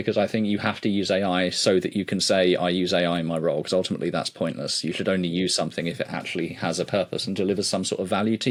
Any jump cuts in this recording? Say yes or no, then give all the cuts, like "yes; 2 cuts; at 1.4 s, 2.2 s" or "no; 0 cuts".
no; 0 cuts